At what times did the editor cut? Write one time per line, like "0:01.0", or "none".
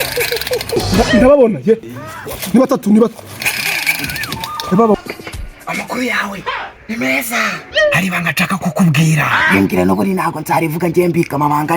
0:04.9